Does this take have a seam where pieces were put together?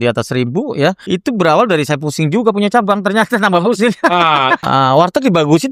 yes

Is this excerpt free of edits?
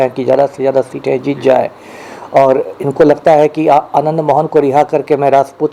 yes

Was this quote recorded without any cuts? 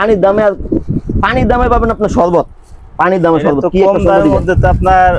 yes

